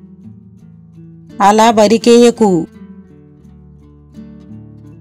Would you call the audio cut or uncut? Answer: uncut